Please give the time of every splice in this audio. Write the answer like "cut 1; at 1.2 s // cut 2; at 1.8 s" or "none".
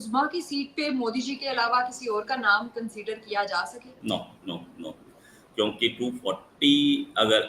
cut 1; at 3.9 s